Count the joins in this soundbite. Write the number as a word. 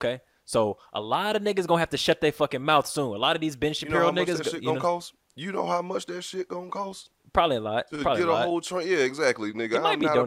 zero